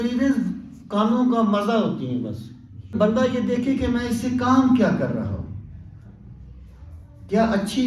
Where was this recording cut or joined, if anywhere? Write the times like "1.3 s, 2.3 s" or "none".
2.9 s